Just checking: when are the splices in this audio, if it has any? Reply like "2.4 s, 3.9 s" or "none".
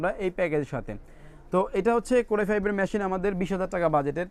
none